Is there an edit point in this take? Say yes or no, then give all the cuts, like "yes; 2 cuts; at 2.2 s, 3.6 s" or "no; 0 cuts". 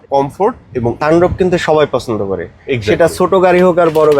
yes; 1 cut; at 0.9 s